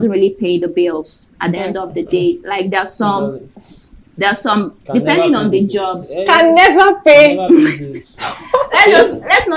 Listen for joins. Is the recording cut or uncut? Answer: uncut